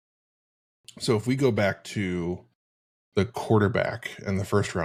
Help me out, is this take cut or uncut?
uncut